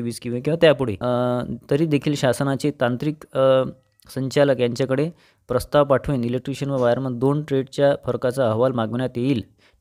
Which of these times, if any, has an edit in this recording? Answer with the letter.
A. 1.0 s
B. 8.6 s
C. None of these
A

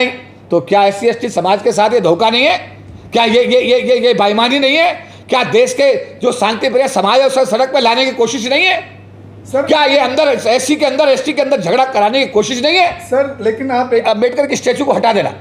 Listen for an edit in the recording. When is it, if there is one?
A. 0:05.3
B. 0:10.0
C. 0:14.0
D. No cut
C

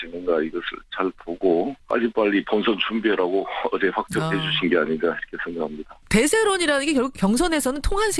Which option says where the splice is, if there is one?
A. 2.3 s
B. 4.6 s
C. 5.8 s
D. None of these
D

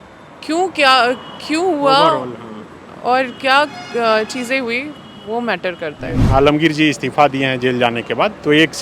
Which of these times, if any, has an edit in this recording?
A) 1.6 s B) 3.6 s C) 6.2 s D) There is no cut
C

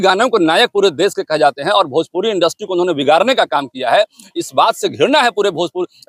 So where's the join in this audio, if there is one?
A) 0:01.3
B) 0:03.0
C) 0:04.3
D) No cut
D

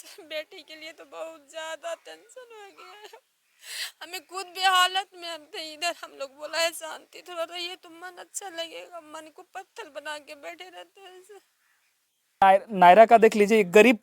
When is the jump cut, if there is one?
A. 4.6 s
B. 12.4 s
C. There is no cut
B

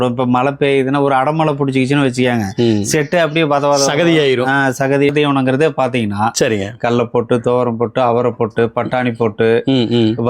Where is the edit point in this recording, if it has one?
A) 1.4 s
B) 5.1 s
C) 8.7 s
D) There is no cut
B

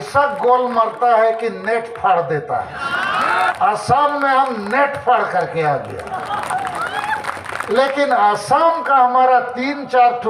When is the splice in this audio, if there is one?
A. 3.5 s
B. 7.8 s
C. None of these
A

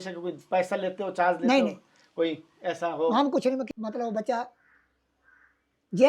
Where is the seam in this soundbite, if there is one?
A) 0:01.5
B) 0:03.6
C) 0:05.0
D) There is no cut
B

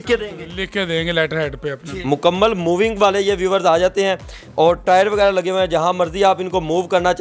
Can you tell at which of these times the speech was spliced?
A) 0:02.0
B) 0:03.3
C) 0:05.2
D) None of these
A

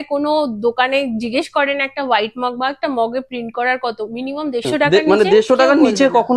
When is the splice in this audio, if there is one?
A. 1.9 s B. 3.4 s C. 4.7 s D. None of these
C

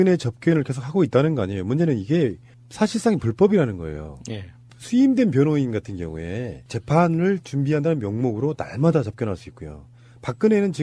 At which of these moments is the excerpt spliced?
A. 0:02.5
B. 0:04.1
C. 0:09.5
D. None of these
D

